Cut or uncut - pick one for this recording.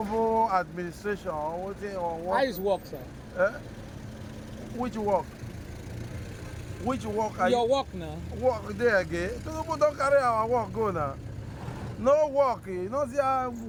uncut